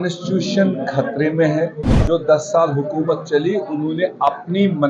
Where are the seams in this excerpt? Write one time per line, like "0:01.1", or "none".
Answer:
0:01.9